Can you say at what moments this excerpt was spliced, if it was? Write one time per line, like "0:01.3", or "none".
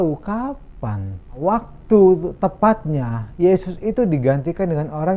0:01.3